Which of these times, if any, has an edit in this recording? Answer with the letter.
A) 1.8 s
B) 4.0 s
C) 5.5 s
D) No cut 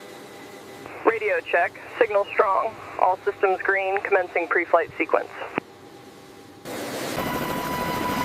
D